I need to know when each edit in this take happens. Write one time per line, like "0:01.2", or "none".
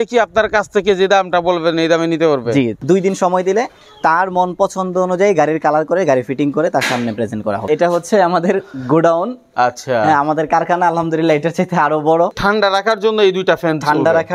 0:02.8
0:07.6
0:12.4